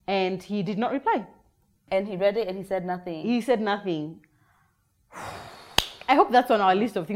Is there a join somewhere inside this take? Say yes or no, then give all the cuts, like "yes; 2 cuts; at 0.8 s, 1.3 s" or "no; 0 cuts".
yes; 1 cut; at 1.8 s